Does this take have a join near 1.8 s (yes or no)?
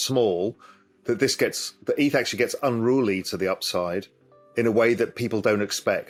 no